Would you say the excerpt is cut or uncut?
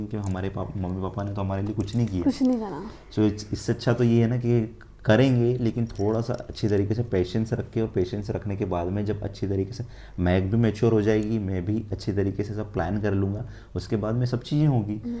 uncut